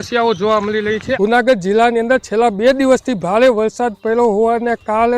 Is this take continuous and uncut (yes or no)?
no